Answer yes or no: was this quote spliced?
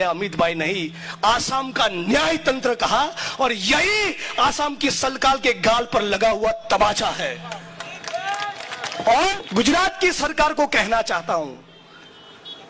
yes